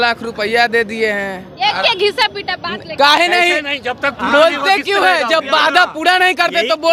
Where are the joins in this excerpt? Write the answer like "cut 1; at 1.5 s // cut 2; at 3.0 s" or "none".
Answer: none

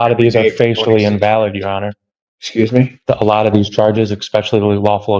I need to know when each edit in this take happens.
none

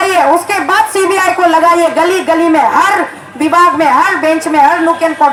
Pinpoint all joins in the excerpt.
none

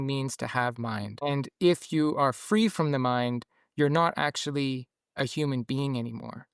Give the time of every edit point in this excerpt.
cut 1; at 1.2 s

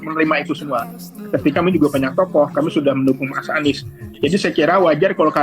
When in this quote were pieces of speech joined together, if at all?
cut 1; at 1.5 s

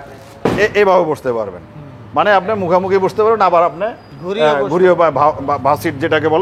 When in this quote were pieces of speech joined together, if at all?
none

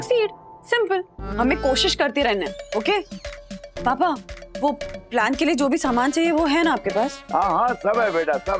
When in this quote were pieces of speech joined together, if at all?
none

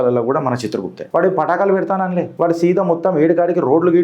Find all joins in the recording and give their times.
cut 1; at 0.9 s // cut 2; at 2.3 s

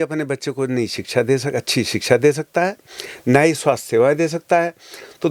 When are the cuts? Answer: none

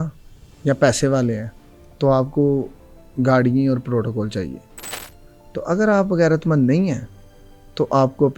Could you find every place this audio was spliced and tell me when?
none

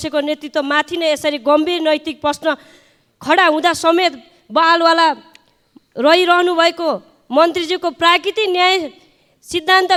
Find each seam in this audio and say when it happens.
none

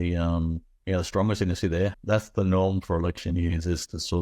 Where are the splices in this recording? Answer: cut 1; at 2.0 s

